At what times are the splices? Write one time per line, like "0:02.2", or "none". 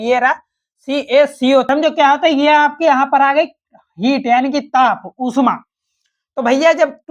0:01.7